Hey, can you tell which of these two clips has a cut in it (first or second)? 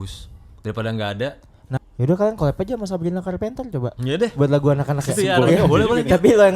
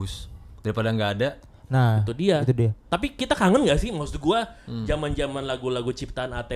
first